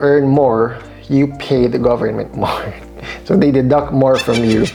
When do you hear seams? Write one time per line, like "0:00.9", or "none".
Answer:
none